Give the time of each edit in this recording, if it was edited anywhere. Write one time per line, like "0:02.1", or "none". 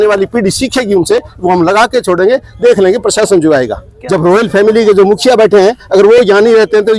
0:03.9